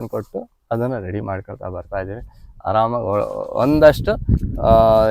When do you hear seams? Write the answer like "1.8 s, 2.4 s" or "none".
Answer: none